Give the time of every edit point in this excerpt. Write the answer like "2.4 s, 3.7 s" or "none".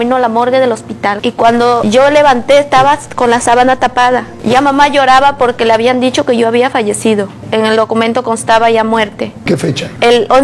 1.1 s, 9.4 s